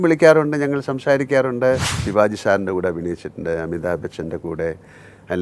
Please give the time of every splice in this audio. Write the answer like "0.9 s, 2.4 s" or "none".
2.0 s